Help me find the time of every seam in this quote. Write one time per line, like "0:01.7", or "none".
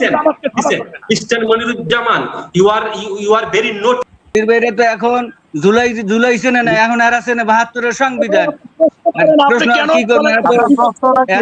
0:04.3